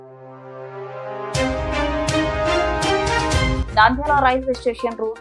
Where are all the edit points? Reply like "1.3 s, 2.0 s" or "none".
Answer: none